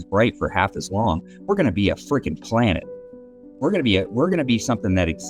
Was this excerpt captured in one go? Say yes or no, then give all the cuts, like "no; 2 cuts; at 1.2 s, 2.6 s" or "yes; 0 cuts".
yes; 0 cuts